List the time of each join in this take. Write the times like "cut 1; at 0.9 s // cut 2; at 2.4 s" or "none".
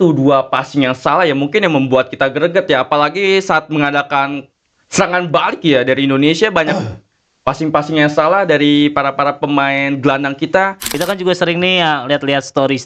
cut 1; at 10.9 s